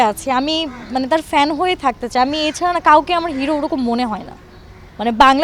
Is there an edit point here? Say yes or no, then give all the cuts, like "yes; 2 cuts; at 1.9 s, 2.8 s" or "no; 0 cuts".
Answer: no; 0 cuts